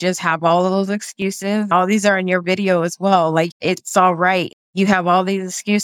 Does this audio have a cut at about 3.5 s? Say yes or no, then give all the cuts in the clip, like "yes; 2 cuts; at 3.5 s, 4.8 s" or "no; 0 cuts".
yes; 3 cuts; at 1.7 s, 3.5 s, 4.5 s